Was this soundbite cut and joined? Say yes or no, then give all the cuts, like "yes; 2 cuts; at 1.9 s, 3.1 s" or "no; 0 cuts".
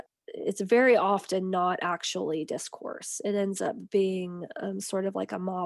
no; 0 cuts